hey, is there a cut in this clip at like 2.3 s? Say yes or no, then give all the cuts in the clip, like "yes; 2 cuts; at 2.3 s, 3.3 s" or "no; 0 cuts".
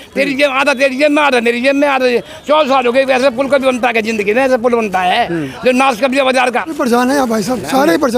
no; 1 cut; at 6.7 s